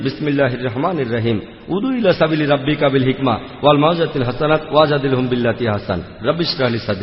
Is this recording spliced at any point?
yes; 1 cut; at 6.1 s

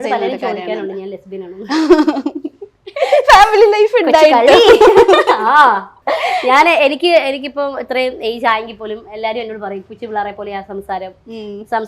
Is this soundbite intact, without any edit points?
no; 1 cut; at 5.9 s

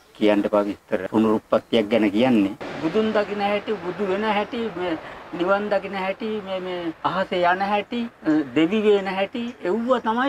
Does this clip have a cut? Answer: yes; 4 cuts; at 1.0 s, 2.7 s, 7.0 s, 8.1 s

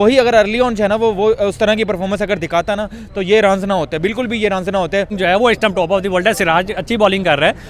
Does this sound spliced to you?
yes; 1 cut; at 5.1 s

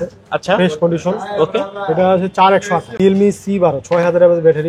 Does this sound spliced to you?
yes; 1 cut; at 2.9 s

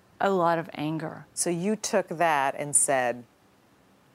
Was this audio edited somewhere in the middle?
yes; 1 cut; at 1.3 s

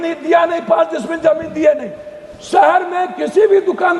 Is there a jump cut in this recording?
no; 0 cuts

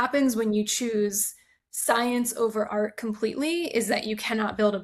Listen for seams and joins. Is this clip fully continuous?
yes; 0 cuts

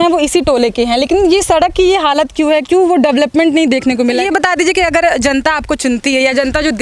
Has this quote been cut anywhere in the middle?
yes; 1 cut; at 4.2 s

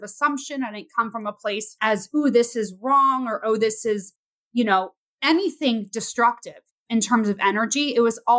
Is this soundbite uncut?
no; 1 cut; at 1.7 s

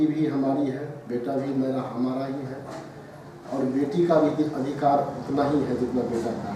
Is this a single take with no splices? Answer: yes; 0 cuts

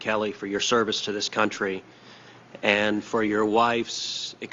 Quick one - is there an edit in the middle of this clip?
no; 0 cuts

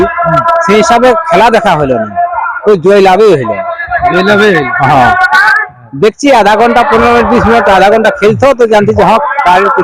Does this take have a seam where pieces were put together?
no; 0 cuts

